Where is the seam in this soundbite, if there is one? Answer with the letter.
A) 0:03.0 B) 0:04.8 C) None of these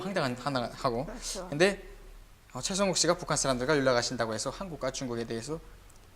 B